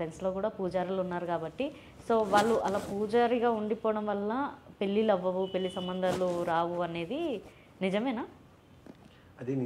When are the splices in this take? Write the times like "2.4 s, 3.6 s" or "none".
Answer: none